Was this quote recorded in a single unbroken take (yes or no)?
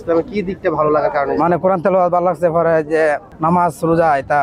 no